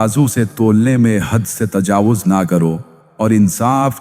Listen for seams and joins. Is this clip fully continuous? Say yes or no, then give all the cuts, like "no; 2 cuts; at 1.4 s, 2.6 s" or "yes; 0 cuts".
no; 1 cut; at 3.0 s